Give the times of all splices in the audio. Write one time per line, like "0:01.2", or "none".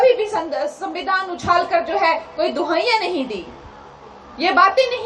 none